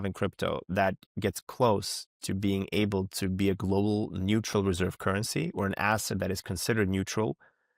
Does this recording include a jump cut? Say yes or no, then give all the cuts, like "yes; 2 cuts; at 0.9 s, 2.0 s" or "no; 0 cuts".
no; 0 cuts